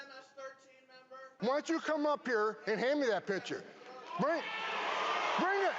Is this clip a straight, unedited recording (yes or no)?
no